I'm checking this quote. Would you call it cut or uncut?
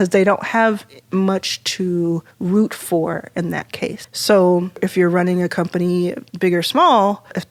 uncut